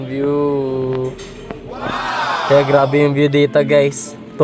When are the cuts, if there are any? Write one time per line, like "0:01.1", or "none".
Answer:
0:02.4